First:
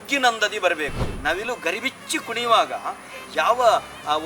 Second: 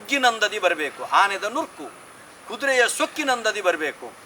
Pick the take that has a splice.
first; 1 cut; at 1.0 s

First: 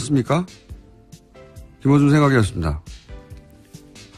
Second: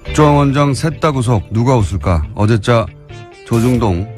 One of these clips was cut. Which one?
first; 1 cut; at 1.7 s

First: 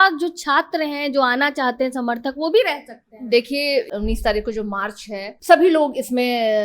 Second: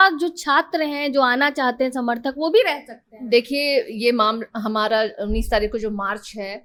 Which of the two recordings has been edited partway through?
first; 2 cuts; at 3.9 s, 5.3 s

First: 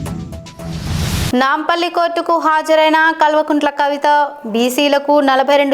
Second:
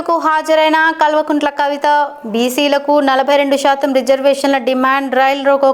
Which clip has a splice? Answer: first; 1 cut; at 1.3 s

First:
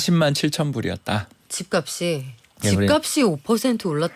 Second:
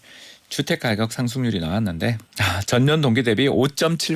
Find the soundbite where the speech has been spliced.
second; 1 cut; at 2.3 s

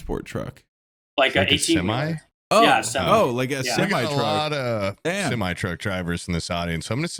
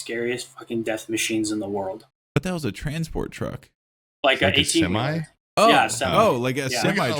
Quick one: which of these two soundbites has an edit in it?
second; 1 cut; at 2.1 s

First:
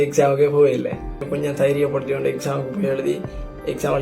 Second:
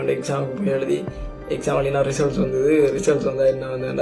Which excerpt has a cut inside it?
first; 1 cut; at 1.3 s

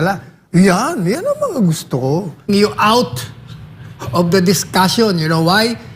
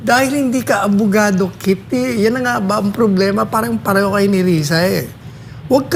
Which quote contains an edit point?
first; 1 cut; at 2.5 s

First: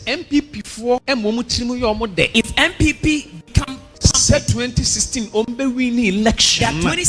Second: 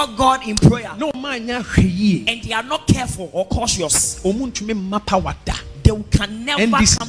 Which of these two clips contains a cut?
first; 3 cuts; at 1.0 s, 2.3 s, 3.8 s

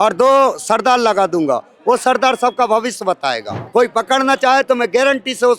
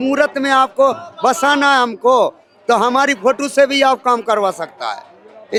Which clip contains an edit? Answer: first; 1 cut; at 3.5 s

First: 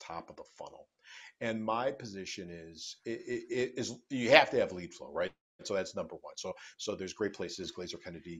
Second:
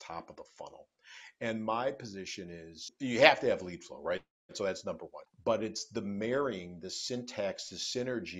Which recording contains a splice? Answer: second; 2 cuts; at 2.9 s, 5.2 s

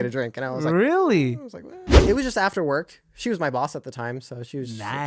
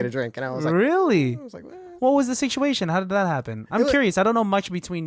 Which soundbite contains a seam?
first; 1 cut; at 1.9 s

